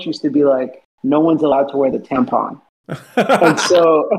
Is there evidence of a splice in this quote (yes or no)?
no